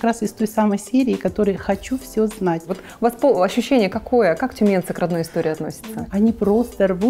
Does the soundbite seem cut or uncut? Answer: cut